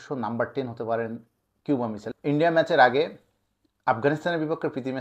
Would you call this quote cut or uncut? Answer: cut